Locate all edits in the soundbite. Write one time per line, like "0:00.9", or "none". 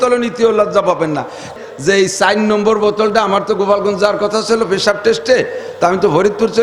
0:01.5